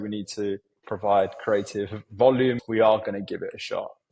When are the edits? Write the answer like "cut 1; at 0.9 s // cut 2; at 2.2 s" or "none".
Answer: cut 1; at 2.6 s